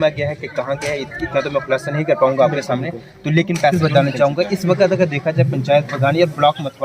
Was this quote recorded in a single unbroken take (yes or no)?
no